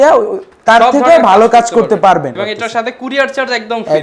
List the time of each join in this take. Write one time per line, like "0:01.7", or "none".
0:02.3